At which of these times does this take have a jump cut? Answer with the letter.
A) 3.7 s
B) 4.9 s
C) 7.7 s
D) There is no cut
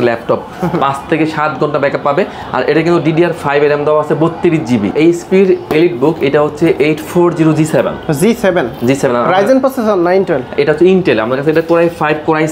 B